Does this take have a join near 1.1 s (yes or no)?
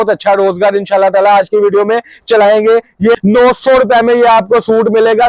no